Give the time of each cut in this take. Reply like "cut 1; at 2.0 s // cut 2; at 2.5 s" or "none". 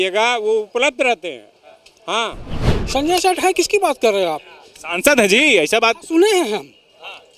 cut 1; at 2.5 s